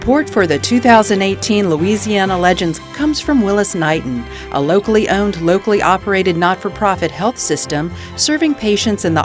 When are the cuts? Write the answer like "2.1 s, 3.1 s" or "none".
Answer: 2.9 s